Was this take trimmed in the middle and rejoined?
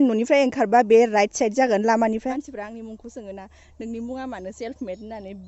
yes; 1 cut; at 2.3 s

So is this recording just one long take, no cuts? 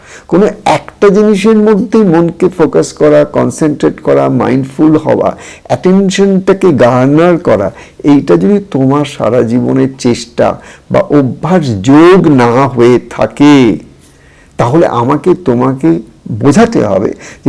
yes; 0 cuts

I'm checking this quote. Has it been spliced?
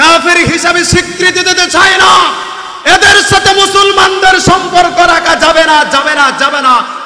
no; 0 cuts

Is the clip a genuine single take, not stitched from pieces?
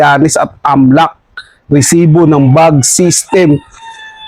yes; 0 cuts

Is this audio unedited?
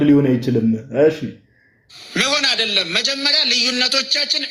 yes; 0 cuts

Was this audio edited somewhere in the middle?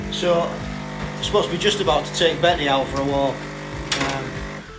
no; 0 cuts

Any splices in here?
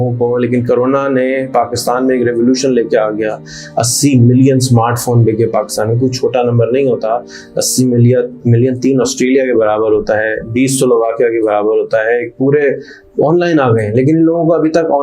no; 0 cuts

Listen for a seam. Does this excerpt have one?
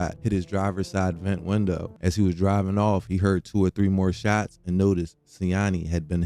yes; 1 cut; at 1.9 s

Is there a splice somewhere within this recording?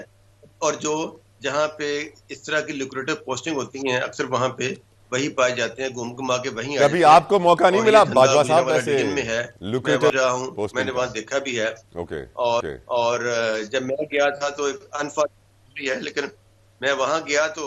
no; 0 cuts

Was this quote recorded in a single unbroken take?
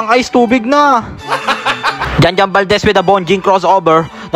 no; 1 cut; at 1.6 s

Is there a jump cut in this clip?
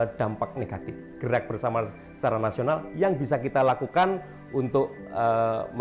yes; 1 cut; at 1.0 s

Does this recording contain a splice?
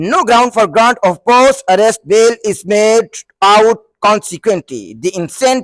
no; 0 cuts

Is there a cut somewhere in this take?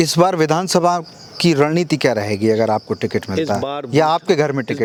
no; 0 cuts

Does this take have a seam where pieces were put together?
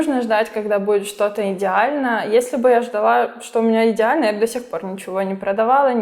no; 0 cuts

